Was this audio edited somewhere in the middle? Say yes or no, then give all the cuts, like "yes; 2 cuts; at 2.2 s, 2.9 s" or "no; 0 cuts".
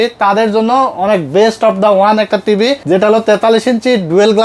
yes; 1 cut; at 2.8 s